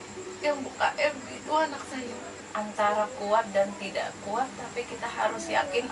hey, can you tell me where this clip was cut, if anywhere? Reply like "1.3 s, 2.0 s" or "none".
2.3 s